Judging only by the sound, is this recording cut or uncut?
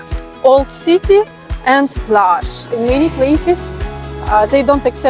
cut